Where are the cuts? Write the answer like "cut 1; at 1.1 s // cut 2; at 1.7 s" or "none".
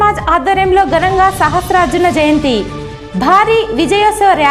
none